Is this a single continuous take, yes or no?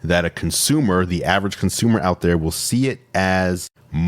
yes